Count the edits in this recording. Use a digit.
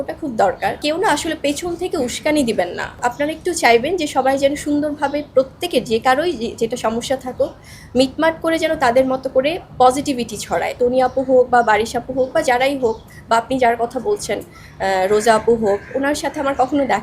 3